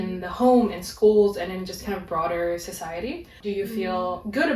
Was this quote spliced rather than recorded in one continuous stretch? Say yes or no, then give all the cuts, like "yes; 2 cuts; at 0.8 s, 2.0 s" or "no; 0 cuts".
yes; 1 cut; at 3.4 s